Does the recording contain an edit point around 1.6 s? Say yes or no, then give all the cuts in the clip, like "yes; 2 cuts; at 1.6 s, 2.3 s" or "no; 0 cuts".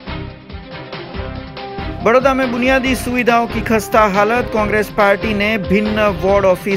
yes; 1 cut; at 1.6 s